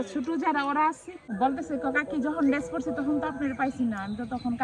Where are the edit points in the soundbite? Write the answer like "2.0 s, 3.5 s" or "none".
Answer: 1.2 s

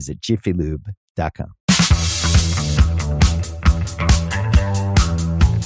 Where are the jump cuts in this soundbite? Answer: 1.5 s

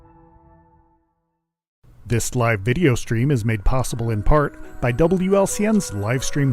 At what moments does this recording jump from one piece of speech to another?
2.0 s

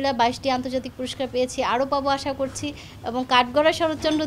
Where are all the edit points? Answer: none

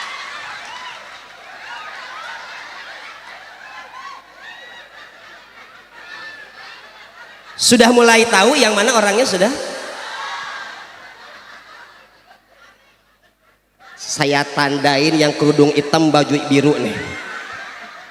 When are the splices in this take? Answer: none

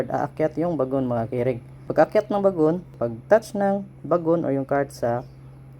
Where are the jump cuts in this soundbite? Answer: 1.7 s, 2.9 s

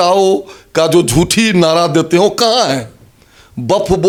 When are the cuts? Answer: none

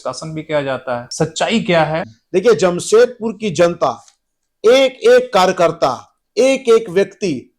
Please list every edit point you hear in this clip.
2.1 s

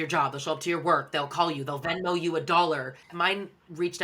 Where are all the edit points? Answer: 3.1 s

